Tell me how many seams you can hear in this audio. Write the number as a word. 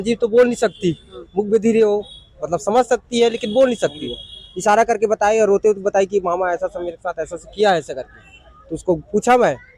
zero